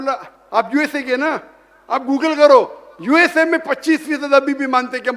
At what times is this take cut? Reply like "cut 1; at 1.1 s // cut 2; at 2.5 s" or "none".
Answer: none